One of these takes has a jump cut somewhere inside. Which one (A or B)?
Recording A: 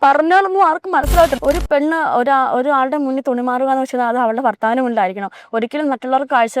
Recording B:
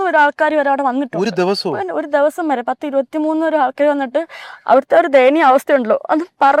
A